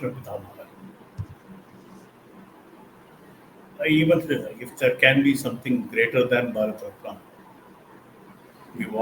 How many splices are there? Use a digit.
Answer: 0